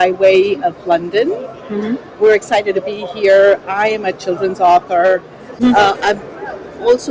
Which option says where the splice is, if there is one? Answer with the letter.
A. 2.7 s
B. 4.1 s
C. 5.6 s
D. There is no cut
C